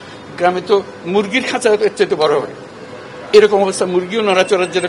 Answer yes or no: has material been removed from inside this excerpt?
no